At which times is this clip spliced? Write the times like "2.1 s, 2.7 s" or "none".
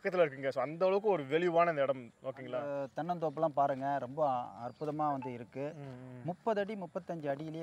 2.7 s